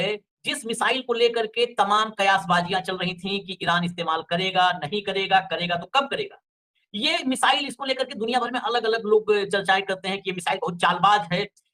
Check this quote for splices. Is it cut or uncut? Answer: uncut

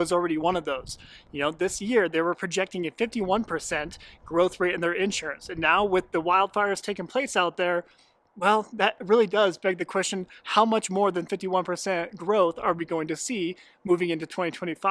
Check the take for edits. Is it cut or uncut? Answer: uncut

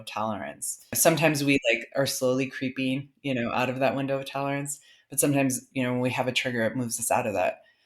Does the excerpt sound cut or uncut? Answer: cut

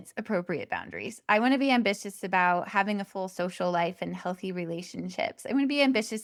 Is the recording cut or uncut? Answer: uncut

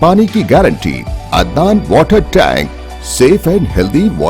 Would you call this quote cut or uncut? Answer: cut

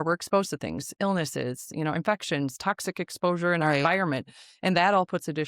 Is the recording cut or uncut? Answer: uncut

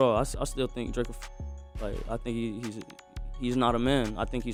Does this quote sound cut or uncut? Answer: uncut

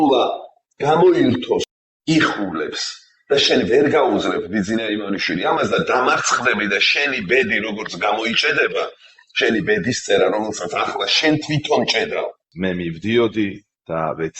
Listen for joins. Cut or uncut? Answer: cut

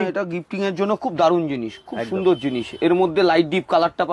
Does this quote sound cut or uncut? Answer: uncut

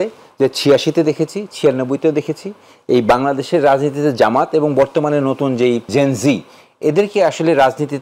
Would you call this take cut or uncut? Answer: cut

